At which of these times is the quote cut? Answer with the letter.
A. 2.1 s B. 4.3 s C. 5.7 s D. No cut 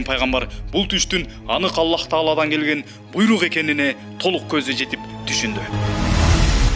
C